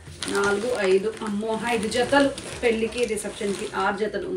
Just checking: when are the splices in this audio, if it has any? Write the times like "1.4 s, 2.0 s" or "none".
none